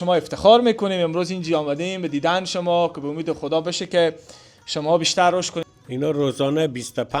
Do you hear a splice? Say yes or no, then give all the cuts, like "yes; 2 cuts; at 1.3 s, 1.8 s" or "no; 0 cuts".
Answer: yes; 1 cut; at 5.6 s